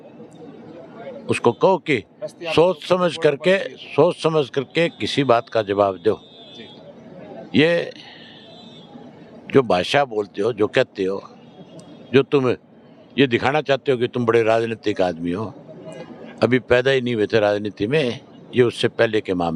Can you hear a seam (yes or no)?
no